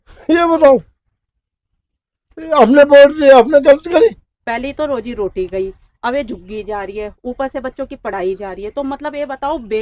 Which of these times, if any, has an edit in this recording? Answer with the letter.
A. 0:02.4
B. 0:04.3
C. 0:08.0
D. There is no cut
B